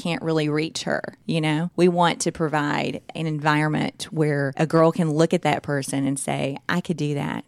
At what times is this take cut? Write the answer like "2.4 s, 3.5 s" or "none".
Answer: 1.5 s, 3.1 s, 4.5 s